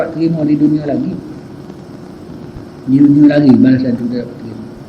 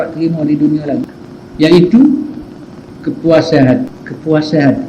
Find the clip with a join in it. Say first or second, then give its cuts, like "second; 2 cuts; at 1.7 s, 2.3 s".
second; 2 cuts; at 1.2 s, 3.9 s